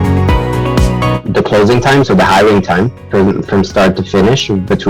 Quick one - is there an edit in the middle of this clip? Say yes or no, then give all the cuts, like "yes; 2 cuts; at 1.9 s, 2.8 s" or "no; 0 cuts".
yes; 1 cut; at 1.2 s